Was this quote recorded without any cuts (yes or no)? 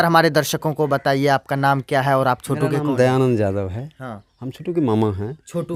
yes